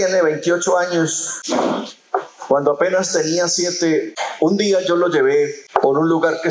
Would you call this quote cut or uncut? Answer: cut